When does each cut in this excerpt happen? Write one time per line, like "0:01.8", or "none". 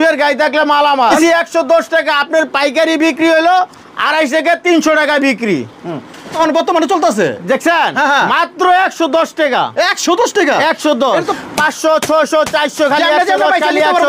0:01.2
0:06.3
0:11.3